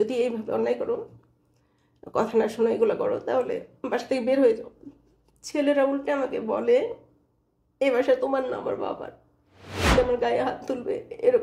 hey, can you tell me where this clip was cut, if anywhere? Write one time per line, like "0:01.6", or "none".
0:09.9